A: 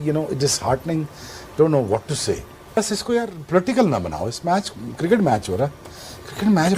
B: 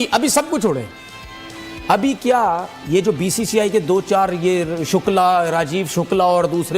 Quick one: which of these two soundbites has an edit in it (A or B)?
A